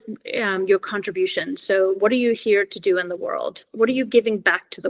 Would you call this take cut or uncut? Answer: uncut